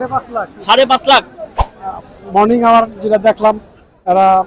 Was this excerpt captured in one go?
no; 1 cut; at 1.6 s

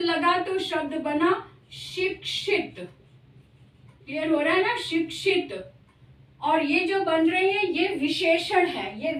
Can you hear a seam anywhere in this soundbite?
no; 0 cuts

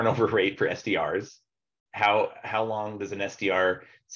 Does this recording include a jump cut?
no; 0 cuts

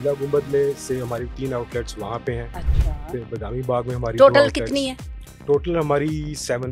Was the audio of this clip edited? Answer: no; 0 cuts

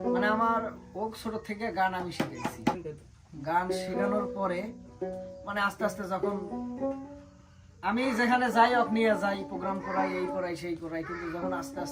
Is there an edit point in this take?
yes; 1 cut; at 2.8 s

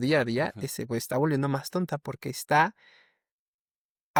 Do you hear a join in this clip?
no; 0 cuts

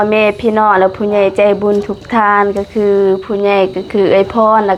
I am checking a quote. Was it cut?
no; 0 cuts

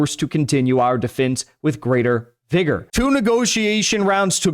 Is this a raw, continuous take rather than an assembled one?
no; 1 cut; at 2.9 s

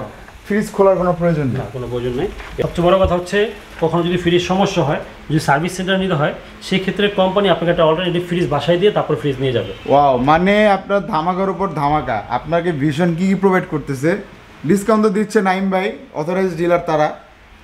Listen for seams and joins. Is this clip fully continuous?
no; 1 cut; at 2.5 s

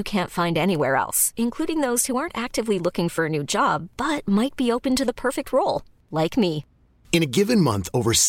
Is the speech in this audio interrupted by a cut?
no; 0 cuts

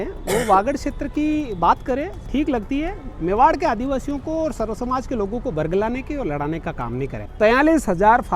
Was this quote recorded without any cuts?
no; 1 cut; at 7.2 s

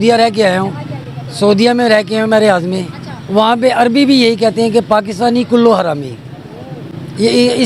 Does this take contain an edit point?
no; 0 cuts

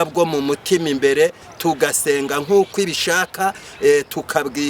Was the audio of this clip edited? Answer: yes; 1 cut; at 1.5 s

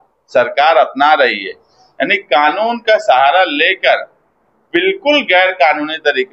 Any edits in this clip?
no; 0 cuts

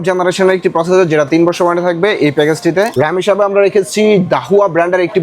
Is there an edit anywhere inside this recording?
yes; 1 cut; at 2.9 s

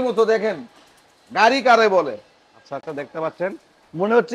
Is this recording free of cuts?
yes; 0 cuts

